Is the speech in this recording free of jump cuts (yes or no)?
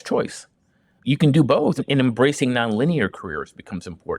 no